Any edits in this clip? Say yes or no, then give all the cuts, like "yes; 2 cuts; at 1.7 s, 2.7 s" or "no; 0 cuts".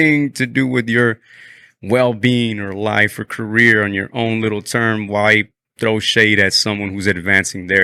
no; 0 cuts